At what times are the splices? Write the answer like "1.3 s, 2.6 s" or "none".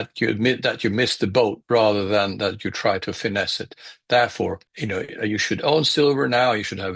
none